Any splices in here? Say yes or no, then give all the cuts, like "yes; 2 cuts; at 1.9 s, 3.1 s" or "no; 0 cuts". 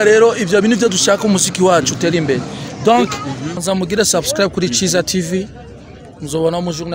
yes; 1 cut; at 3.6 s